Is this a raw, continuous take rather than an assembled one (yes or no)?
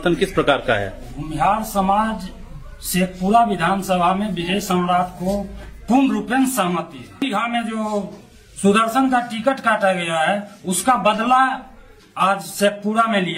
no